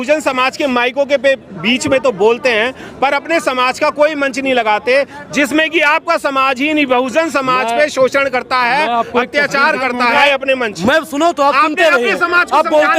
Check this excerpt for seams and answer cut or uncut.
cut